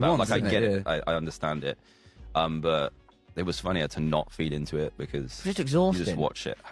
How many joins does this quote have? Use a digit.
0